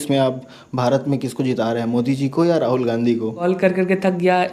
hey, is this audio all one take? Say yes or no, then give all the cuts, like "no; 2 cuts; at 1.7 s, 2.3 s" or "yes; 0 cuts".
no; 1 cut; at 3.4 s